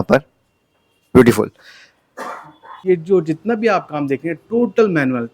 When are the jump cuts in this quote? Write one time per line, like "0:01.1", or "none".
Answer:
0:02.7